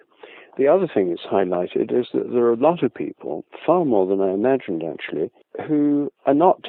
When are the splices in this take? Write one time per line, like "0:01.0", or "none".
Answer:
none